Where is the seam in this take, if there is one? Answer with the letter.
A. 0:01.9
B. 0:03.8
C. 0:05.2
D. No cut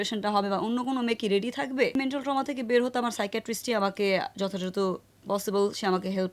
A